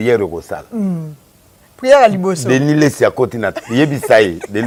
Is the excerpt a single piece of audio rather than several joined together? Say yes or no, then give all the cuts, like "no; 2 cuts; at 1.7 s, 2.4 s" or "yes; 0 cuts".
yes; 0 cuts